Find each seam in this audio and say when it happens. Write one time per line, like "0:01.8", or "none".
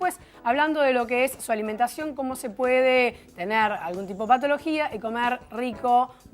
0:01.4